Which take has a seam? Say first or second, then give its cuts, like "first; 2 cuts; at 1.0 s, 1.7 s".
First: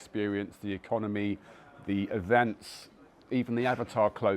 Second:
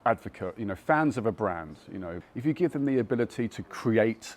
second; 1 cut; at 2.1 s